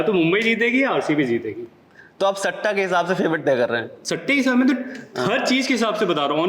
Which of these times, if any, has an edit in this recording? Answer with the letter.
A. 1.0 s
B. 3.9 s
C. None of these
C